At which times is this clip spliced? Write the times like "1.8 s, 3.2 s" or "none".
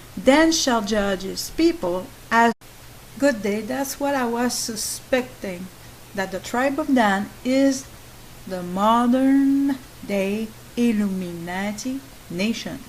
none